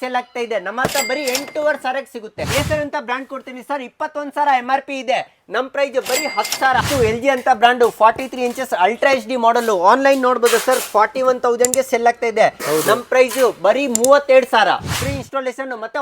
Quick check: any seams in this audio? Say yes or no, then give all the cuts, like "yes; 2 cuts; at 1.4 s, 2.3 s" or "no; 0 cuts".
yes; 3 cuts; at 2.4 s, 6.8 s, 14.9 s